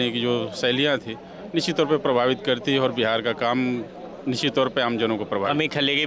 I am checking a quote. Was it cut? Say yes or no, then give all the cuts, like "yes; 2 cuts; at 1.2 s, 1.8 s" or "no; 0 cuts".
no; 0 cuts